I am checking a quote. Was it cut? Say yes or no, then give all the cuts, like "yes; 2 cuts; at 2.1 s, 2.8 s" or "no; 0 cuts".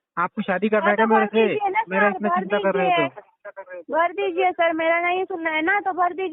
no; 0 cuts